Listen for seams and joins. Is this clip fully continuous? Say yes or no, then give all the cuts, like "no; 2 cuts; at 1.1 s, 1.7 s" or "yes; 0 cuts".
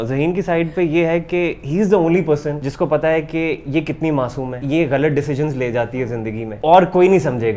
no; 3 cuts; at 2.6 s, 4.6 s, 6.5 s